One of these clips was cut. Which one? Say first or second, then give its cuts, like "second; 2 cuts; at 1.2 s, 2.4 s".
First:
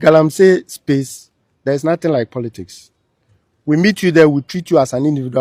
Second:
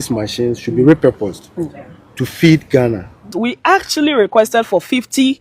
second; 1 cut; at 3.3 s